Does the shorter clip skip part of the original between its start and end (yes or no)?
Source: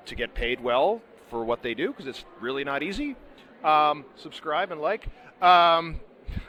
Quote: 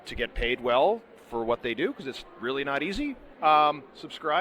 yes